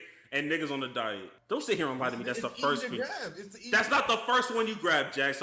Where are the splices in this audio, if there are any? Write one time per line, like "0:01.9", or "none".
0:01.3